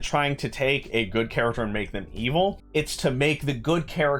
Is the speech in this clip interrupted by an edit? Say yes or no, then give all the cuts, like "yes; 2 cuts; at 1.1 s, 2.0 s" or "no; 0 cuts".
yes; 1 cut; at 2.6 s